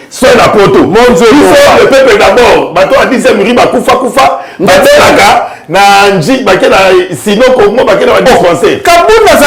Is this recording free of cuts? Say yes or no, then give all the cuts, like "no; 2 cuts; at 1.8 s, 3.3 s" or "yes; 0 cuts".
yes; 0 cuts